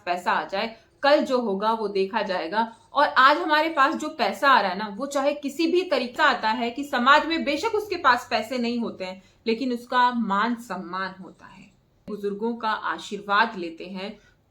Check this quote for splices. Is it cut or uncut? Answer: cut